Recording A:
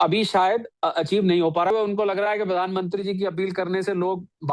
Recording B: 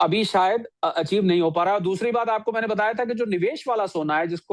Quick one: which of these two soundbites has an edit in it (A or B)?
A